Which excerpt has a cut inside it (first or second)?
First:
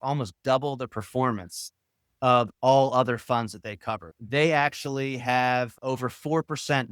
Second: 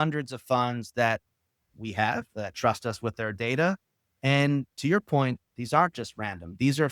first